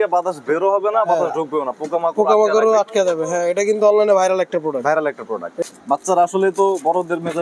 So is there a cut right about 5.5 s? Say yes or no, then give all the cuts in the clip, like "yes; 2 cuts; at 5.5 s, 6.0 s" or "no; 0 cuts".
yes; 1 cut; at 5.5 s